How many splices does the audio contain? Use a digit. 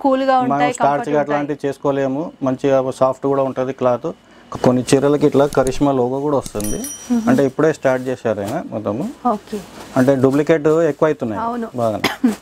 1